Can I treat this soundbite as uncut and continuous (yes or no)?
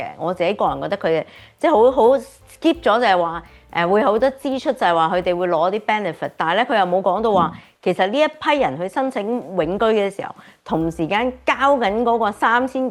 yes